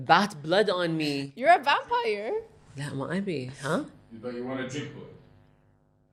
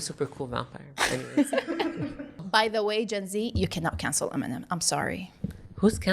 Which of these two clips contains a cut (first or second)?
second